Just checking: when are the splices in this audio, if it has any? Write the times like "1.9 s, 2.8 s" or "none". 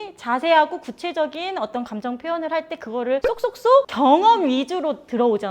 3.5 s